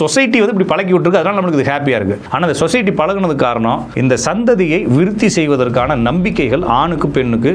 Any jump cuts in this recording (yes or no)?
yes